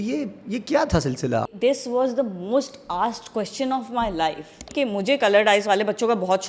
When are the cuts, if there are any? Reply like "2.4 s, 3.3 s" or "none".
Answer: 1.4 s, 4.6 s